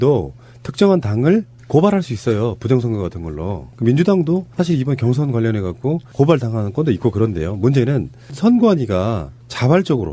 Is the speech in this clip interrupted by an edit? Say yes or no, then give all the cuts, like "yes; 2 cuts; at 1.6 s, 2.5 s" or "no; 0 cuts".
no; 0 cuts